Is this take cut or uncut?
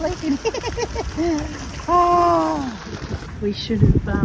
cut